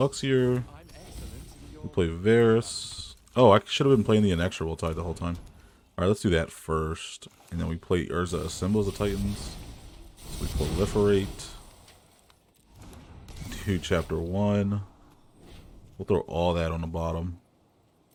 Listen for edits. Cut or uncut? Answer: uncut